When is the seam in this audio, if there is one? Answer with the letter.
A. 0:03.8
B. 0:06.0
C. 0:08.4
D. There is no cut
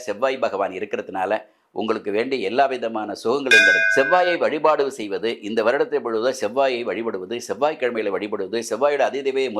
A